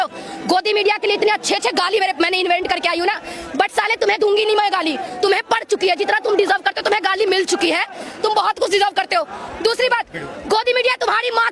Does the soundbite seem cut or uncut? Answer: uncut